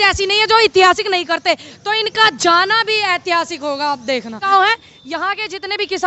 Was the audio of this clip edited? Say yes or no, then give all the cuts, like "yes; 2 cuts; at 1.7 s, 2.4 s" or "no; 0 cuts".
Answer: yes; 1 cut; at 4.4 s